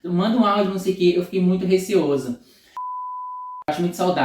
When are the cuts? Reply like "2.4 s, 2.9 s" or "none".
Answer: 3.1 s